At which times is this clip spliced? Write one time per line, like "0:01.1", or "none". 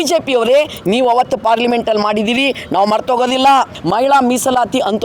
0:03.8